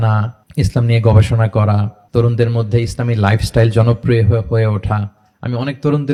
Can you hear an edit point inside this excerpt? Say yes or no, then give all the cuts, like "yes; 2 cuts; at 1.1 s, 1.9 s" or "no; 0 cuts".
no; 0 cuts